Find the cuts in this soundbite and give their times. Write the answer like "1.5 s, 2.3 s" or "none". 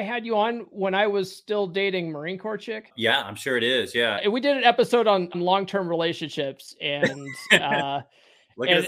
2.9 s, 4.2 s, 5.3 s